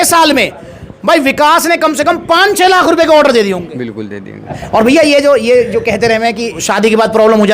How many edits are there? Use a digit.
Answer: 2